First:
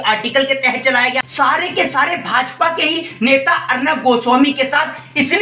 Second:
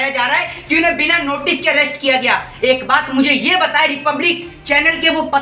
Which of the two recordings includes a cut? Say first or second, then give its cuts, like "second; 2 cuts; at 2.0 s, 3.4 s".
first; 1 cut; at 1.3 s